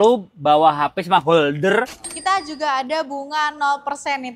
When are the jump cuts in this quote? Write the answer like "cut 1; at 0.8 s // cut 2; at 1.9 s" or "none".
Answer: cut 1; at 2.0 s